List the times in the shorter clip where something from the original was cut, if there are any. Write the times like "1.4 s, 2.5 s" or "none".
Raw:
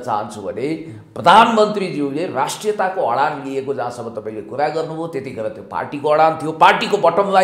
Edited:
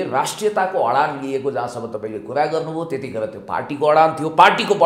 none